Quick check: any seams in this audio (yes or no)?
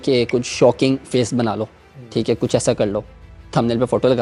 no